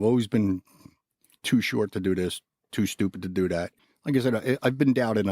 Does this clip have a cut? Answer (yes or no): yes